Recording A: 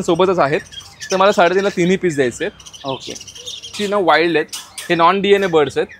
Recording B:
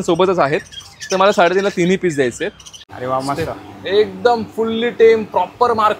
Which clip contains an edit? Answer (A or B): B